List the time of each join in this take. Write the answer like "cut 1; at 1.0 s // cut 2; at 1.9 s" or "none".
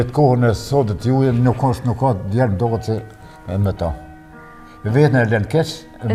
none